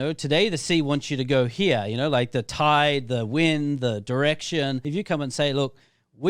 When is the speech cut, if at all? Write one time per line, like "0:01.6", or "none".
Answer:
0:04.8